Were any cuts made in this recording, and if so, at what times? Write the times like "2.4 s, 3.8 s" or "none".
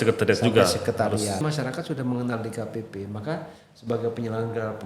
1.4 s